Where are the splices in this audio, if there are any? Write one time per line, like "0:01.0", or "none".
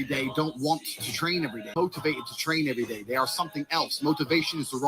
0:01.7